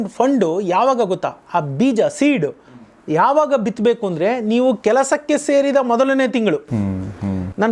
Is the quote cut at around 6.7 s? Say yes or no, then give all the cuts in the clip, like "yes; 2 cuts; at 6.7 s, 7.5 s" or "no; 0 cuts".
no; 0 cuts